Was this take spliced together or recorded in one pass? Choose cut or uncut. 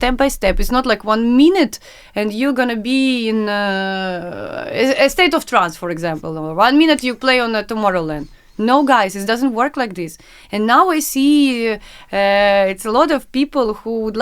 uncut